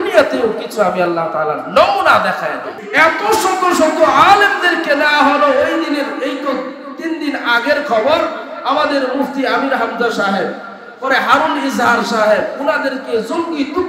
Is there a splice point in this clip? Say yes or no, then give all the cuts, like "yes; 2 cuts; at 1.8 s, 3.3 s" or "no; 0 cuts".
yes; 1 cut; at 2.8 s